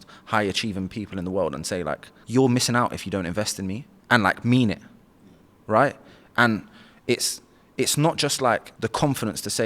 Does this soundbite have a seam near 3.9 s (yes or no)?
yes